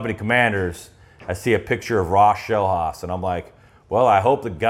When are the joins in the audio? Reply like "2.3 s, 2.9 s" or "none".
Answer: none